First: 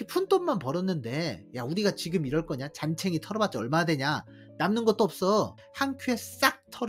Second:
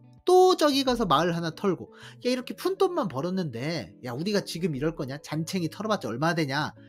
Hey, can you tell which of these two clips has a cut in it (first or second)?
first